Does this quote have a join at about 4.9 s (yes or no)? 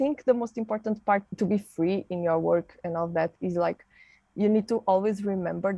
no